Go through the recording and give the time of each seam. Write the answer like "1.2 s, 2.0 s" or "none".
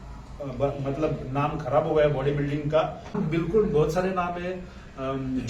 3.1 s